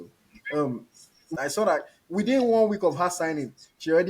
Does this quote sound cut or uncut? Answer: cut